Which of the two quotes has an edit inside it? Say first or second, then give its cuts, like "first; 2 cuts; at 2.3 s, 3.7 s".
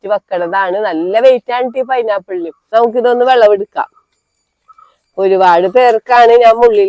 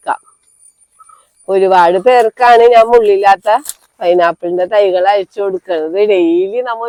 first; 1 cut; at 2.6 s